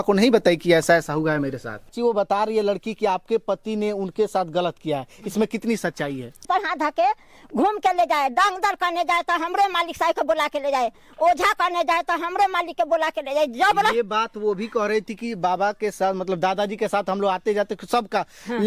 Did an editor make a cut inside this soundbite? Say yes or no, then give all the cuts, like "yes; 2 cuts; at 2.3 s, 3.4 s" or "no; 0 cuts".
yes; 2 cuts; at 1.9 s, 6.4 s